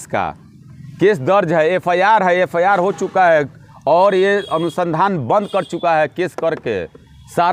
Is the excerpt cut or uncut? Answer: uncut